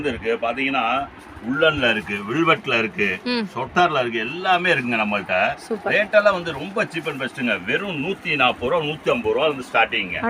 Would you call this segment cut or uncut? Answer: uncut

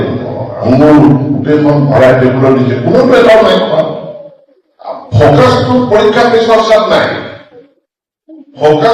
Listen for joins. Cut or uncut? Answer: uncut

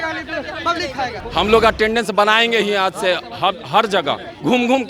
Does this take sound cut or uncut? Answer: cut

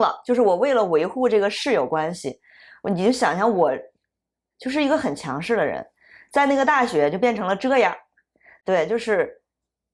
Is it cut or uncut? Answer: uncut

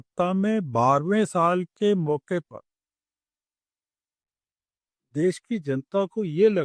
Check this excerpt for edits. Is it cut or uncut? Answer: uncut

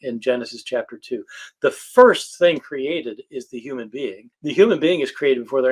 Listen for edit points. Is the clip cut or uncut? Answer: cut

